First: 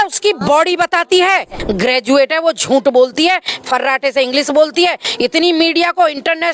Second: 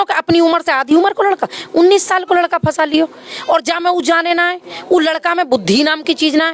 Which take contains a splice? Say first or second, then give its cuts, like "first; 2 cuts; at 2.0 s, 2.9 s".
first; 1 cut; at 1.6 s